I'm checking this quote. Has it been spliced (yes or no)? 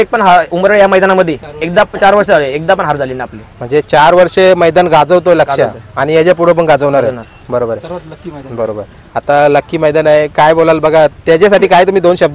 no